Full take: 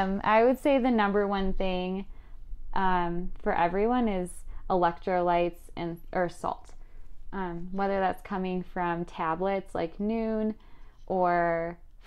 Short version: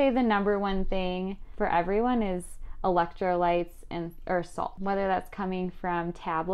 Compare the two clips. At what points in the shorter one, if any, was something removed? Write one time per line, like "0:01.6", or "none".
0:01.5
0:04.8